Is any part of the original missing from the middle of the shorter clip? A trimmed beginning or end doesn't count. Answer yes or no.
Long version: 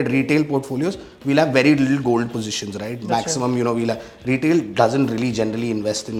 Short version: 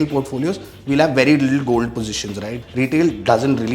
yes